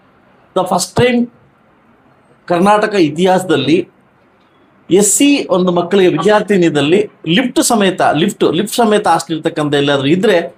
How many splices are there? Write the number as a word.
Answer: zero